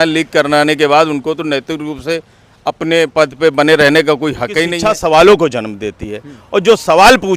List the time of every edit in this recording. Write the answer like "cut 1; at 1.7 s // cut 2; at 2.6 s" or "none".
cut 1; at 4.7 s

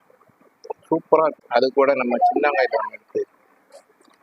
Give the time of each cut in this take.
cut 1; at 1.4 s

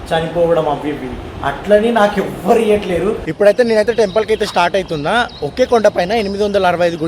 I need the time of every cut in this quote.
cut 1; at 3.3 s

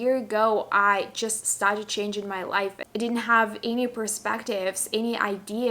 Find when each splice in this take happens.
cut 1; at 2.8 s

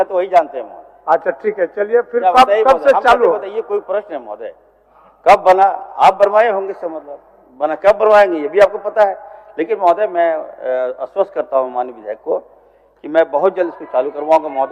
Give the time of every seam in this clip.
none

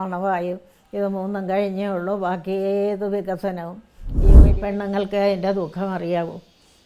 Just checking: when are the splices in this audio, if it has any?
cut 1; at 4.3 s

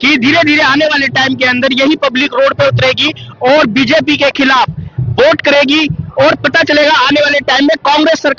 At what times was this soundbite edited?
none

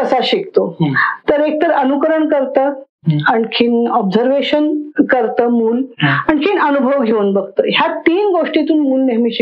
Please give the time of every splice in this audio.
none

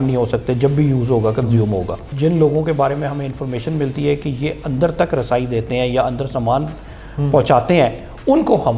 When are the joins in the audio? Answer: cut 1; at 2.1 s

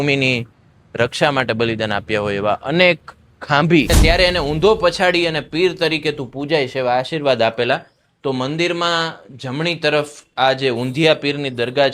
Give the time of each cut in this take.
cut 1; at 3.9 s

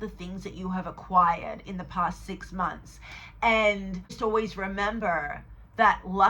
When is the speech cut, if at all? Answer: cut 1; at 4.1 s

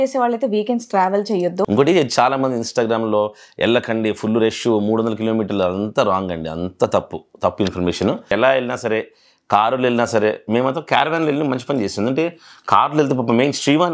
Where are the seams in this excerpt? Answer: cut 1; at 1.6 s // cut 2; at 8.3 s

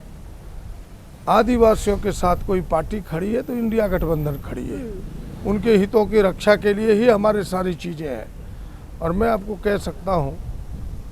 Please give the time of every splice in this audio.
none

